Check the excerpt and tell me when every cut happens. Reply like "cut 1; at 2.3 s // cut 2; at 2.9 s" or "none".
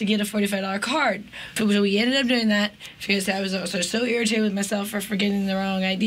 cut 1; at 1.4 s